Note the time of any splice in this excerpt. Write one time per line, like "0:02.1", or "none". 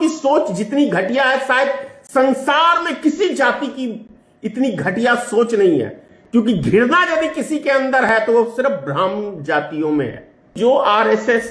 0:10.6